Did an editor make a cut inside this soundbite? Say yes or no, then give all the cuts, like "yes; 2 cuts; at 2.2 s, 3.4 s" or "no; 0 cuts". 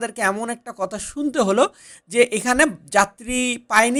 no; 0 cuts